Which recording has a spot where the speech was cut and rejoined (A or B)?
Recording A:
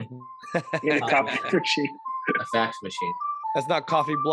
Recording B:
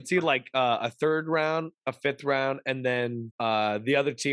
B